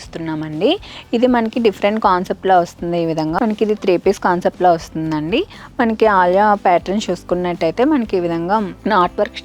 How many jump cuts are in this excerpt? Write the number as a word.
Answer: one